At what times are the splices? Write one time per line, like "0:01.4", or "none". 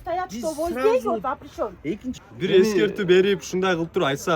0:02.1